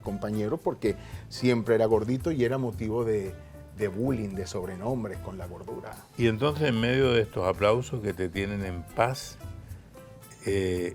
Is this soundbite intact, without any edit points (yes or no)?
yes